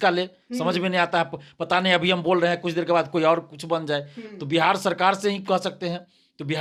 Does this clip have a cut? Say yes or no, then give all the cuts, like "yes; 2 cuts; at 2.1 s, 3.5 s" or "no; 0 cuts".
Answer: no; 0 cuts